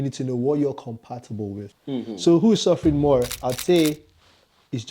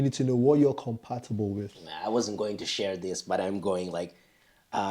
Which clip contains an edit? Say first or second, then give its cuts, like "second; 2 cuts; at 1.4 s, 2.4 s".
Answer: first; 1 cut; at 1.7 s